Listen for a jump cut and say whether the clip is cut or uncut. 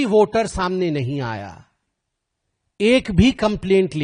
uncut